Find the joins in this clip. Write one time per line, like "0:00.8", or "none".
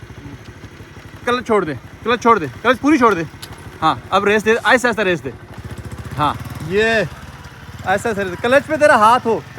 none